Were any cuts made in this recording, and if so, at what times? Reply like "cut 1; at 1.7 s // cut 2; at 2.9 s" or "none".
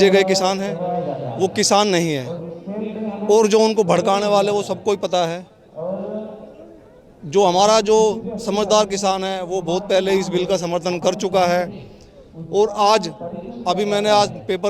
none